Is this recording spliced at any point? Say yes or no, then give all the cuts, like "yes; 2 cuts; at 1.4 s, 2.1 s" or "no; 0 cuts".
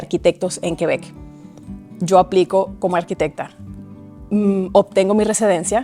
no; 0 cuts